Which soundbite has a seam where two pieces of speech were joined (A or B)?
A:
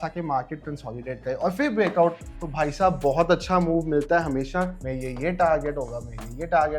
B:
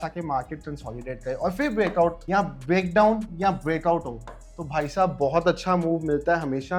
A